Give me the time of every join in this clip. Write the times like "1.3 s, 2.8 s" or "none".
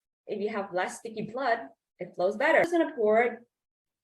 2.6 s